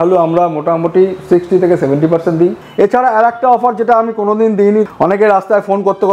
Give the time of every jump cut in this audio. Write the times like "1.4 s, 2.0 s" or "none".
2.6 s, 4.9 s